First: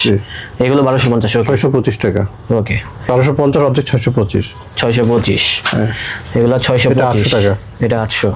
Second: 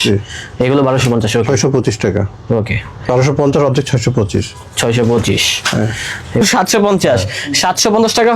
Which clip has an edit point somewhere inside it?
second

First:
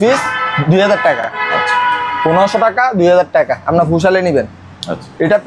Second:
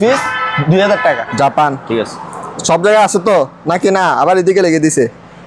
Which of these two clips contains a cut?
second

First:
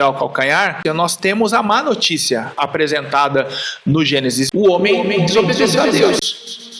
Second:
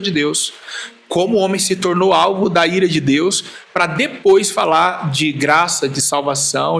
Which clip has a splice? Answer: first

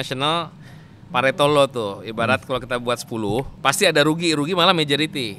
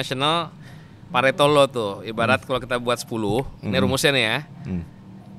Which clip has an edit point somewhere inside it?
first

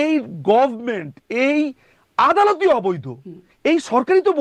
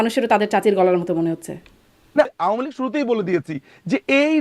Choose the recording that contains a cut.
second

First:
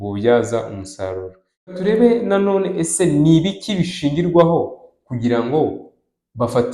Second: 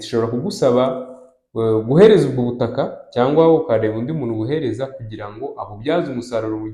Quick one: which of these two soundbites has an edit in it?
first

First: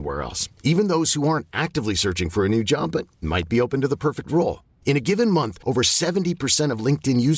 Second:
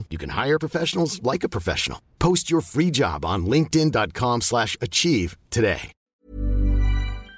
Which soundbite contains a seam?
second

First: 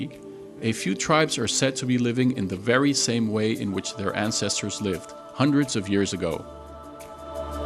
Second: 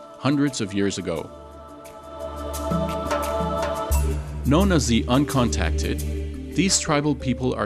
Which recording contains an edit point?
second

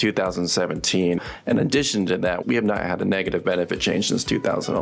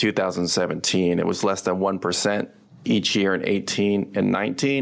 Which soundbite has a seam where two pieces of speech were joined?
first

